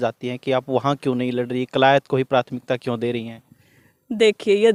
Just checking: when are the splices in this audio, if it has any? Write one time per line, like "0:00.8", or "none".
none